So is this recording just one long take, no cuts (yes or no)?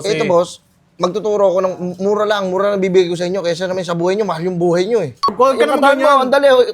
no